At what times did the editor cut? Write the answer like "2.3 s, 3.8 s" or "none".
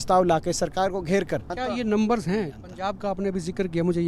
1.5 s, 2.6 s